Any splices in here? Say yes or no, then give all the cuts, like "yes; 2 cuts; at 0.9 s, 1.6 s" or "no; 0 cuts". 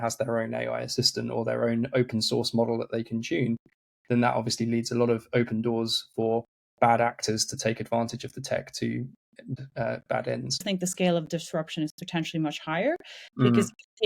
yes; 2 cuts; at 9.6 s, 10.6 s